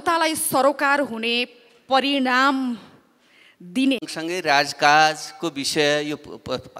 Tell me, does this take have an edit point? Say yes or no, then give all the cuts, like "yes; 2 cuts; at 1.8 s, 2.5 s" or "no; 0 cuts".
no; 0 cuts